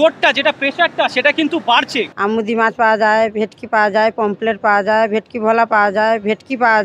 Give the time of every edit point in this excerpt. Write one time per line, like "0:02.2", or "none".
0:02.1